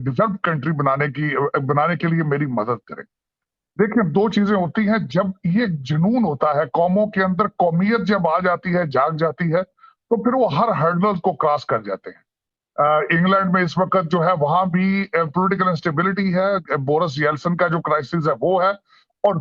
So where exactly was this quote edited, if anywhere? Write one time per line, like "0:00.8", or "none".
none